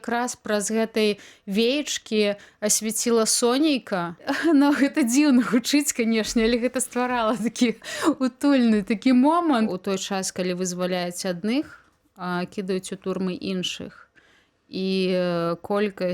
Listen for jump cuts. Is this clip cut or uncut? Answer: cut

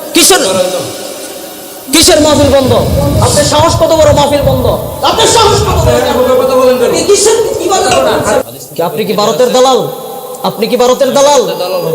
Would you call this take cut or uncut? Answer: cut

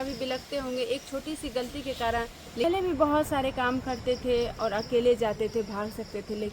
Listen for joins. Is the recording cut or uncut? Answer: cut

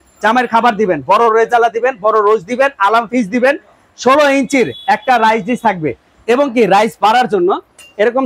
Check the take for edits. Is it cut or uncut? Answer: uncut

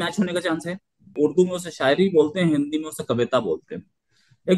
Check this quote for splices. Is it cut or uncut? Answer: cut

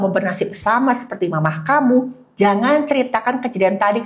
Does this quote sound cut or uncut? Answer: uncut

